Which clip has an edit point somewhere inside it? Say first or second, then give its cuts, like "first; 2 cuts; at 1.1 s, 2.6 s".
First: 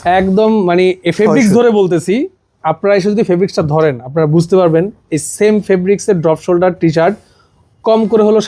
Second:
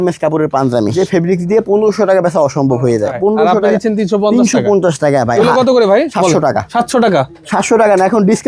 second; 4 cuts; at 0.9 s, 3.2 s, 5.3 s, 6.4 s